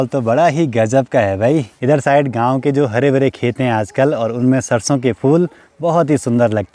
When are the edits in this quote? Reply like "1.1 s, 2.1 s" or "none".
none